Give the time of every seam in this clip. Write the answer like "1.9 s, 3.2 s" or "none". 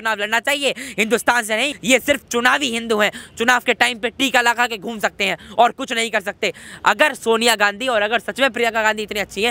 1.8 s